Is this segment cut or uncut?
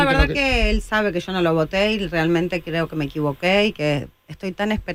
uncut